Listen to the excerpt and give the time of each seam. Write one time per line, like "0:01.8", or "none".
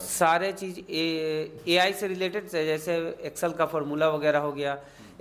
none